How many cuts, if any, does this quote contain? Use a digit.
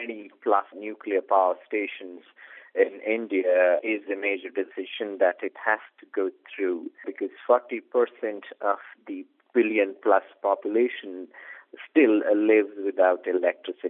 0